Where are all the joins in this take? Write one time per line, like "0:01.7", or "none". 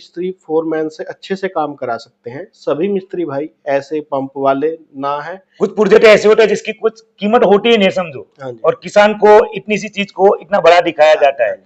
0:05.4